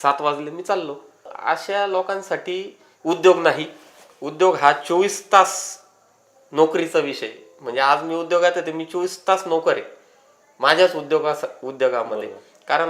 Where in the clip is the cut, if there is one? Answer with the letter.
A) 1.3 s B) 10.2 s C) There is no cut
A